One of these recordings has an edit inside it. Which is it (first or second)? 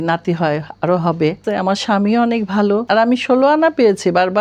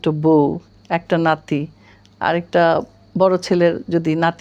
first